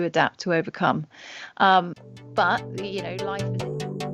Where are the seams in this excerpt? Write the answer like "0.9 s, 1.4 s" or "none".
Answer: 3.1 s